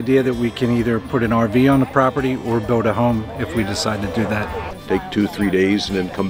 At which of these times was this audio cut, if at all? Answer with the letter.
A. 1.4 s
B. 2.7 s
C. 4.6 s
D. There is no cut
C